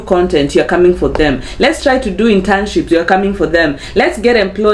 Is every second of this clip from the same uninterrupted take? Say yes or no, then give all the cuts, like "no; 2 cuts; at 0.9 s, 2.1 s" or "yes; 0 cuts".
yes; 0 cuts